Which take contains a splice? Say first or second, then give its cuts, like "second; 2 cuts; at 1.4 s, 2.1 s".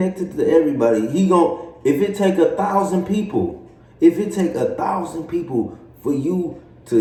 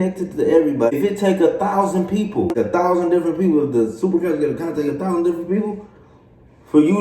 second; 2 cuts; at 0.9 s, 2.5 s